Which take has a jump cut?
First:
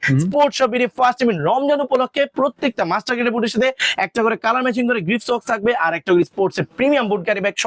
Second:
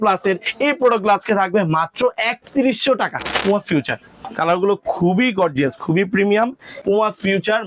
second; 2 cuts; at 3.7 s, 6.7 s

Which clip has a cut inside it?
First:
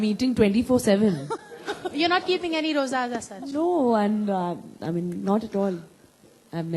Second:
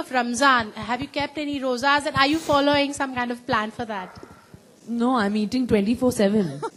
first; 1 cut; at 1.3 s

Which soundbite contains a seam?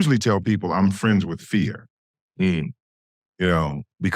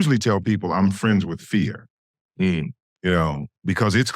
second; 1 cut; at 2.8 s

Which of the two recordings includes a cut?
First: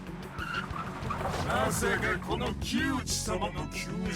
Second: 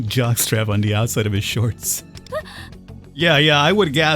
second; 2 cuts; at 2.2 s, 3.1 s

